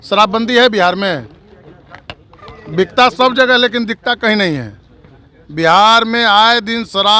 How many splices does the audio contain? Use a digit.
0